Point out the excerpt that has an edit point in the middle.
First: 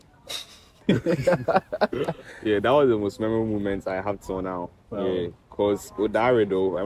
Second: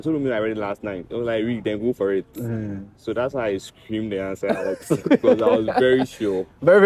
first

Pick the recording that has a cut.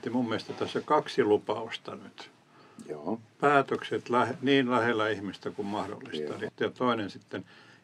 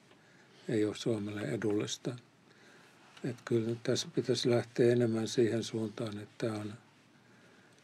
first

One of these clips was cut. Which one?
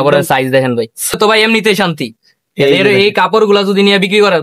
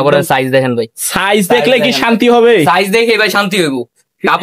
first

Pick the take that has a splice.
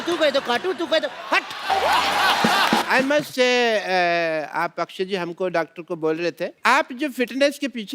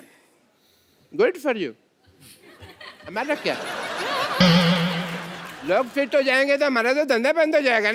first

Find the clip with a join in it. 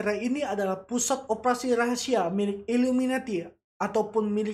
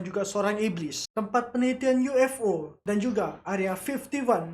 second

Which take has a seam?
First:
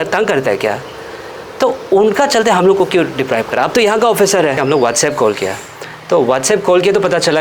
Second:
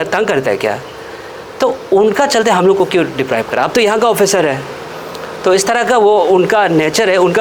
first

